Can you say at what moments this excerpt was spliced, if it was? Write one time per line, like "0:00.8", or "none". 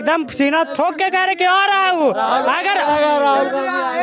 none